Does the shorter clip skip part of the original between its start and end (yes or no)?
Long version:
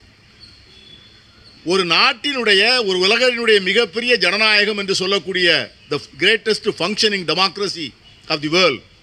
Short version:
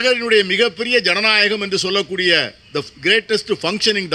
no